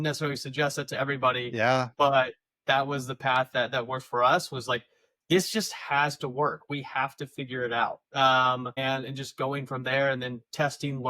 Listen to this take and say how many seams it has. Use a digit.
1